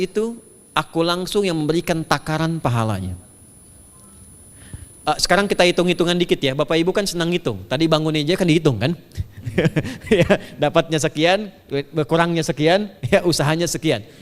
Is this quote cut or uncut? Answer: uncut